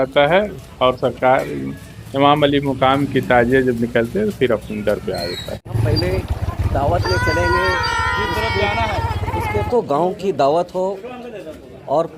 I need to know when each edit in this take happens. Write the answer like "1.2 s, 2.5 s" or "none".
5.7 s, 9.7 s

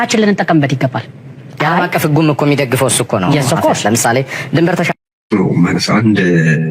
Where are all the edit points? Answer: 5.2 s

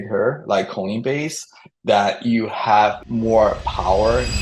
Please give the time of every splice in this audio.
3.0 s

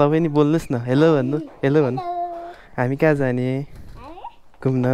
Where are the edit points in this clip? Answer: none

